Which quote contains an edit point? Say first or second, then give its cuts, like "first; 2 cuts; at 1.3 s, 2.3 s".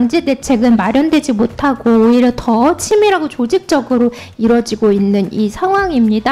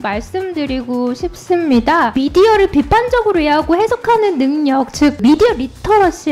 second; 2 cuts; at 2.1 s, 5.2 s